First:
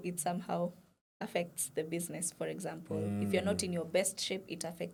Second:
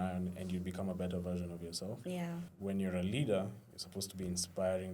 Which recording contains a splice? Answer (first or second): second